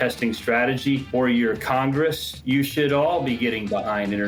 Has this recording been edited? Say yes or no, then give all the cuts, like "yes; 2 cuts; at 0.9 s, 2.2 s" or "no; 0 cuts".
no; 0 cuts